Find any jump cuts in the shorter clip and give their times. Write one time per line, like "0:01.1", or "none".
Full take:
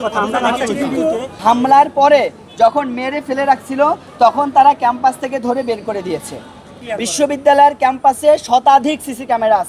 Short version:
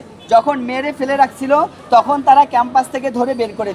none